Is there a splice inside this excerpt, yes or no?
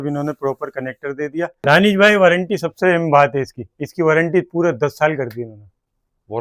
yes